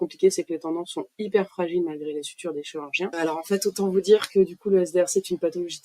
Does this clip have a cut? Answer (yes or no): yes